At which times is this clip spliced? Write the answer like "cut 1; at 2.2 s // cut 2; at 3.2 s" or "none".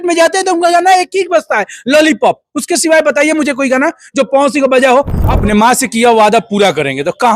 cut 1; at 5.2 s